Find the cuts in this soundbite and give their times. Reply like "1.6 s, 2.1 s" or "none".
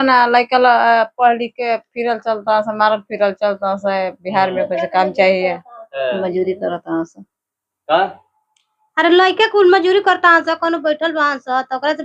none